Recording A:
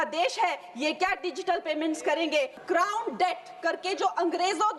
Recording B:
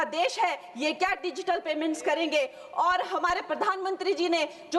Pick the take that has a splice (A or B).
A